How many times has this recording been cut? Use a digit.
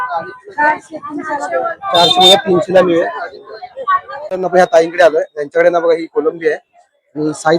1